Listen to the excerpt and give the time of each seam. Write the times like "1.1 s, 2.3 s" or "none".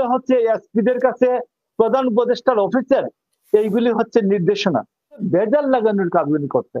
5.2 s